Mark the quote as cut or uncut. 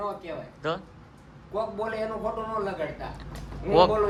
uncut